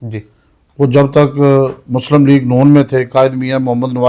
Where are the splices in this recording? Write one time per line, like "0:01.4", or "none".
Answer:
none

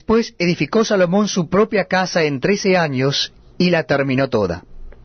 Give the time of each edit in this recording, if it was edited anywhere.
none

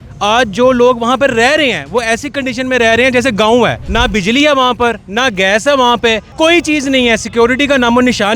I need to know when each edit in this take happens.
0:03.8
0:06.3

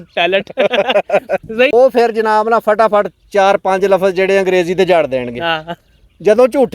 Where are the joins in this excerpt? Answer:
0:01.7

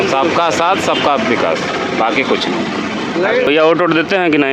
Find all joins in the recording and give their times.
none

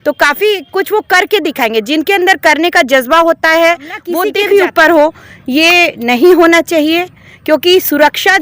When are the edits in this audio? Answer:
0:04.3

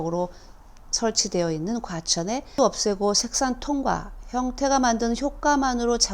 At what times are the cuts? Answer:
0:02.5

